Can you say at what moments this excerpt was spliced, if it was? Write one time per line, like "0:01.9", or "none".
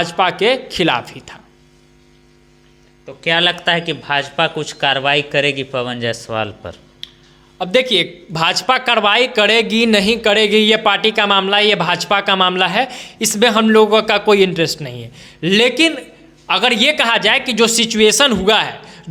none

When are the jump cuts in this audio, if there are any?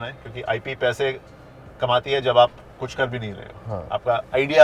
none

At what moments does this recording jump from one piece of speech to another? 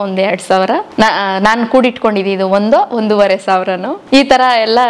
0:00.9
0:03.9

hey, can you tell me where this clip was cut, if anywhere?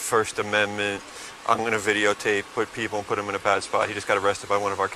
none

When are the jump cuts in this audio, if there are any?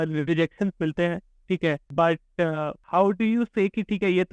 0:01.8
0:02.8

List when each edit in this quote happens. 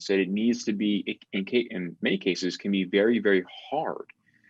none

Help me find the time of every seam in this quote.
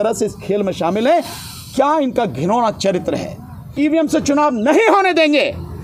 0:03.6

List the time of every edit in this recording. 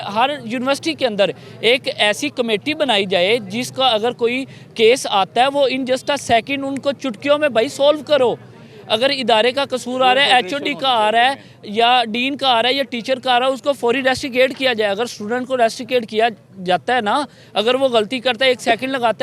none

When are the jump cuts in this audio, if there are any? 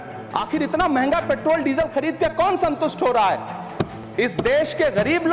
none

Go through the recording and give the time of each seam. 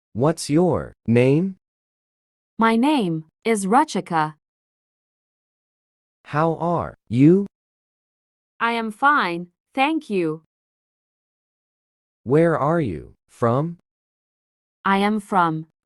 0:00.9

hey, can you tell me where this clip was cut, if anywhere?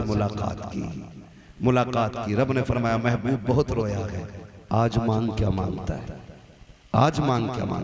none

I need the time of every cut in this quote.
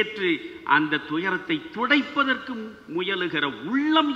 none

